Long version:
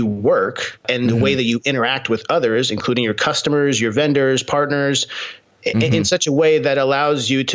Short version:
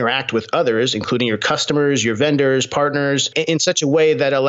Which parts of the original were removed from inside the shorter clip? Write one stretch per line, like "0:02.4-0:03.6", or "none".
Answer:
0:05.2-0:05.9